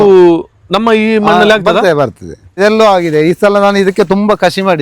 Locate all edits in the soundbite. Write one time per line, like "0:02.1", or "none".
0:02.6